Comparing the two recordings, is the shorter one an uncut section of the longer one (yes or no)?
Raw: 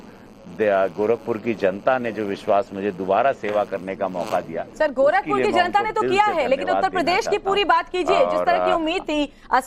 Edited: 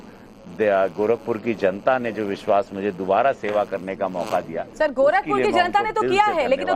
yes